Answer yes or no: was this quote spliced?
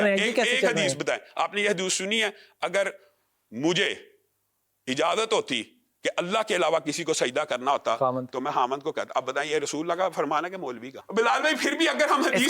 yes